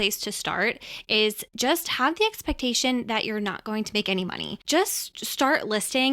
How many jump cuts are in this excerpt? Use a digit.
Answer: 1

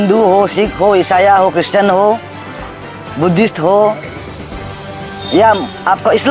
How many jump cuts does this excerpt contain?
0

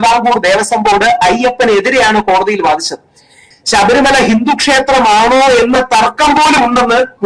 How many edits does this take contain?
1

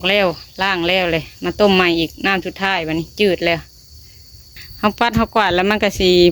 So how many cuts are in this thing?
1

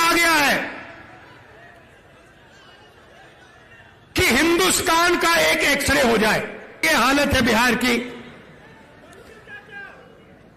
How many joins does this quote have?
1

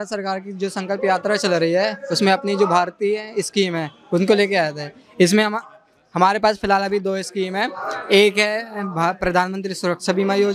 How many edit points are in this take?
0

